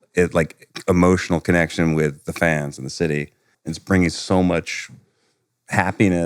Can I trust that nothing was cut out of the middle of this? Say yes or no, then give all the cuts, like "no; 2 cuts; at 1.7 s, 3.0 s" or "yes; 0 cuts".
no; 1 cut; at 3.5 s